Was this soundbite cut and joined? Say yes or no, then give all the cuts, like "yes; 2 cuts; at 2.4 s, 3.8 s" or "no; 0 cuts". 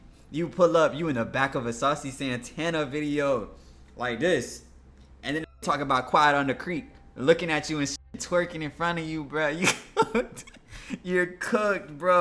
no; 0 cuts